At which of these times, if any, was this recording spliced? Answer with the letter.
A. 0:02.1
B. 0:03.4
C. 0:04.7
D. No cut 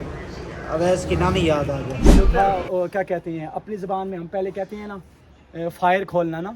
A